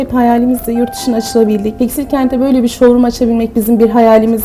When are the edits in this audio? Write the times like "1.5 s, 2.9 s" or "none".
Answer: 1.7 s